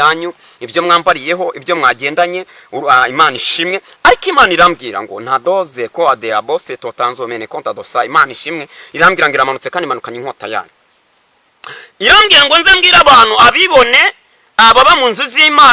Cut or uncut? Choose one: uncut